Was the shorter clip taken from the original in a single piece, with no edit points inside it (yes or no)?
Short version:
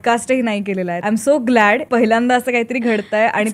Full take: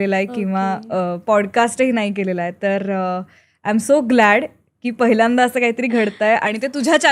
no